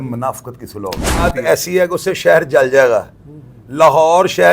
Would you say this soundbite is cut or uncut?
cut